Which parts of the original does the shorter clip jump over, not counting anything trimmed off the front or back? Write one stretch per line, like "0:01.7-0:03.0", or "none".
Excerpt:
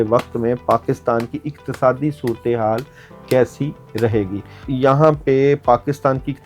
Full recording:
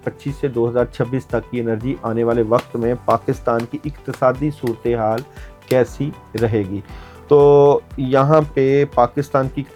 0:07.0-0:07.9